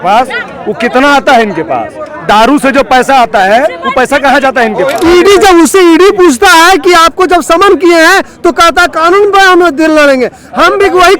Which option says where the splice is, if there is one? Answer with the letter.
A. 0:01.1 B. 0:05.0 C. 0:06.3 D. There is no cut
B